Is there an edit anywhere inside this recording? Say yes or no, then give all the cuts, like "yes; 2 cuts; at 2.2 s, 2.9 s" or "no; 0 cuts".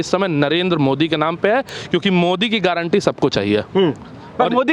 no; 0 cuts